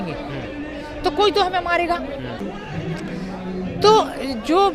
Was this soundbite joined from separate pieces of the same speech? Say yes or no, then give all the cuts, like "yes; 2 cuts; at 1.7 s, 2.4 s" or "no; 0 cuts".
no; 0 cuts